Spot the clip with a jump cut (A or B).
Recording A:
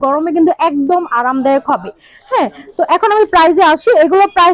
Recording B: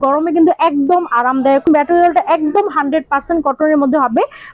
B